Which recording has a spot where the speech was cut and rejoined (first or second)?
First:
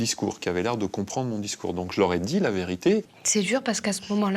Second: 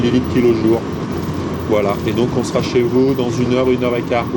first